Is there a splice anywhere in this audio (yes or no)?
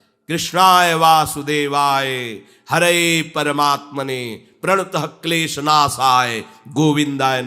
no